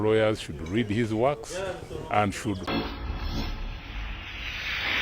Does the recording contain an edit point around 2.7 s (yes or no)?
yes